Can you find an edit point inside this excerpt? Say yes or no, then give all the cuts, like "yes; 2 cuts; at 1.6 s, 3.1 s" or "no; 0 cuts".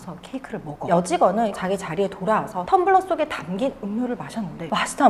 yes; 2 cuts; at 0.9 s, 1.5 s